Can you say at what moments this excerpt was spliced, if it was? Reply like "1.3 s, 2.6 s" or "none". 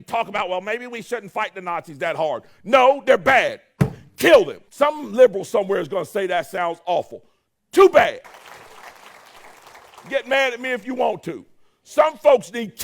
4.6 s, 8.2 s